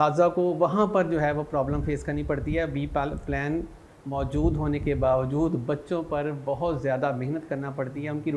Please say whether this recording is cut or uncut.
uncut